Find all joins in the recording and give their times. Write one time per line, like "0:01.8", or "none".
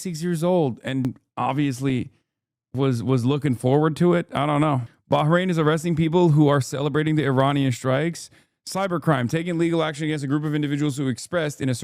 0:01.1